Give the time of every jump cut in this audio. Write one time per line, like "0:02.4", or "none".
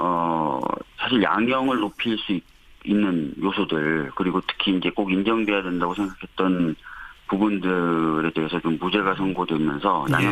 0:01.3